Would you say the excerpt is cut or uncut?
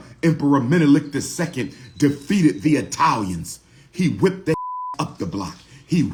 uncut